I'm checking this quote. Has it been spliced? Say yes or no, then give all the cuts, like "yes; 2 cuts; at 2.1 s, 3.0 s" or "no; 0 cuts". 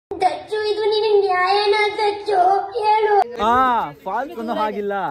yes; 1 cut; at 3.3 s